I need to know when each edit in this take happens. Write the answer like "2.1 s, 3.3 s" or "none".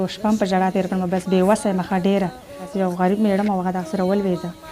2.6 s